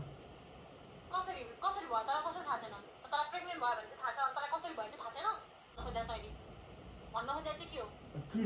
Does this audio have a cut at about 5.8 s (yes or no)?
yes